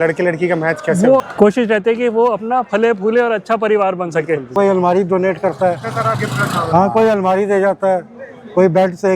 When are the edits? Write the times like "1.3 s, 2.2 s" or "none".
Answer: 1.3 s, 4.5 s